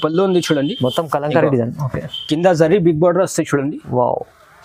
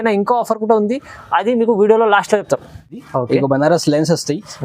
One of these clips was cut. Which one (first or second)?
second